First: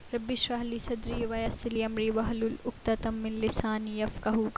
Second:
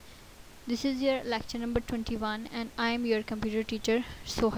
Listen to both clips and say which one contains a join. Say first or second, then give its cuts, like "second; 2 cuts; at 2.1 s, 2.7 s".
first; 1 cut; at 1.6 s